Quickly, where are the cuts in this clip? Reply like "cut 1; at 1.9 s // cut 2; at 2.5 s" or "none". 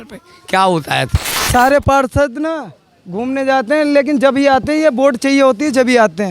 cut 1; at 1.5 s